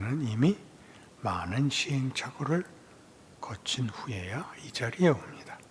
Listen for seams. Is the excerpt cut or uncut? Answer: uncut